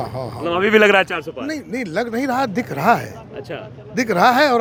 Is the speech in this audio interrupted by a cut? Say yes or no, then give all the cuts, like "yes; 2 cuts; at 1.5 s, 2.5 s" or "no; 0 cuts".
no; 0 cuts